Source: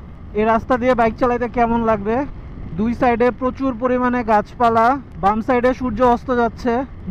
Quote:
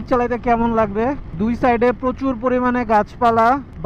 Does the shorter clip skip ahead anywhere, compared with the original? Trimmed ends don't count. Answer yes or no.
yes